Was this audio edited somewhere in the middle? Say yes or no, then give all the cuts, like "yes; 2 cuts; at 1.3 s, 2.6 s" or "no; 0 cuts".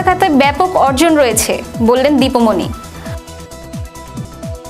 yes; 1 cut; at 2.7 s